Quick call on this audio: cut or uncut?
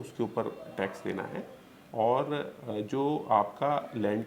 uncut